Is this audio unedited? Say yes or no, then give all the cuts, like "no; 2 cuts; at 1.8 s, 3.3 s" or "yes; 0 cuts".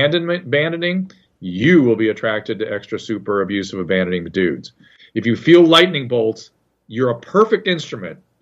no; 1 cut; at 5.0 s